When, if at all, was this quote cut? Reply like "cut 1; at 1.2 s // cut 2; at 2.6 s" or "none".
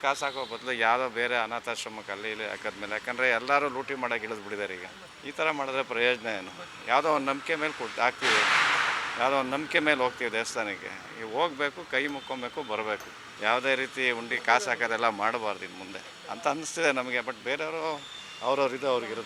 none